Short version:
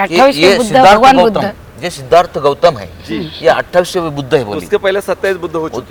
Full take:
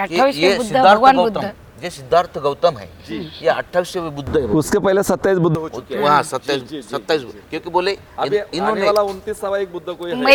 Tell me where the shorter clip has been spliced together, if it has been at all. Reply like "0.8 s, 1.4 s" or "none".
none